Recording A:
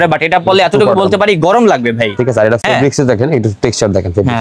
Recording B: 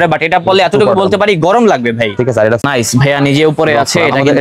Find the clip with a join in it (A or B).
B